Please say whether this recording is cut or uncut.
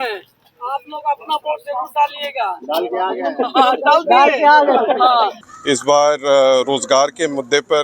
cut